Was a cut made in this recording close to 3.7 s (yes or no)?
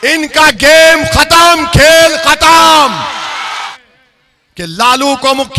yes